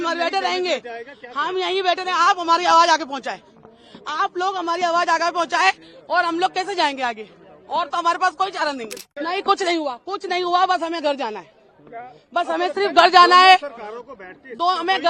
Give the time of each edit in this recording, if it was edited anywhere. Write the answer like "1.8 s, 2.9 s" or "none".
9.0 s